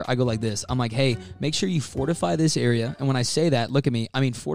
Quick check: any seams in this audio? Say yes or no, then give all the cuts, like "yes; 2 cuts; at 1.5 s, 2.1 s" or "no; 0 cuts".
no; 0 cuts